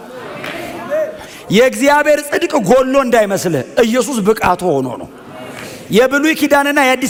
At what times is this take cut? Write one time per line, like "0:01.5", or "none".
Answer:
none